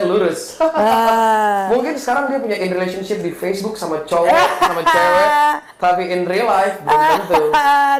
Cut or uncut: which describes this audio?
uncut